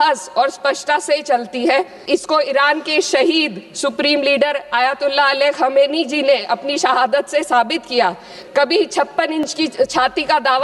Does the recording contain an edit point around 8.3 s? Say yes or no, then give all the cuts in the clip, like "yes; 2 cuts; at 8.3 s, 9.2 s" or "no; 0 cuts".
yes; 2 cuts; at 2.1 s, 8.3 s